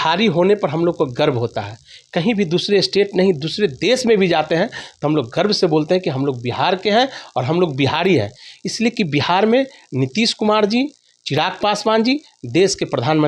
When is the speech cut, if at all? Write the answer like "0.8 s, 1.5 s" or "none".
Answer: none